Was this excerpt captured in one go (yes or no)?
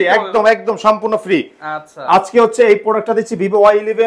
yes